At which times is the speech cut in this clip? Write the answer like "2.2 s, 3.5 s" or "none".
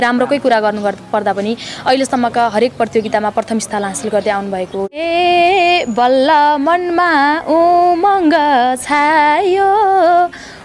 4.9 s